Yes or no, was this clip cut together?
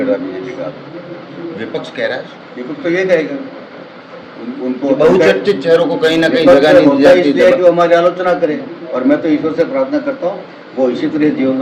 no